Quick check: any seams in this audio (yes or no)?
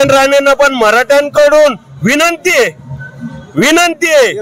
no